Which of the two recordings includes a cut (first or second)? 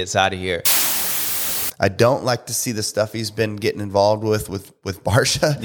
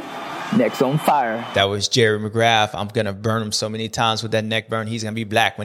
first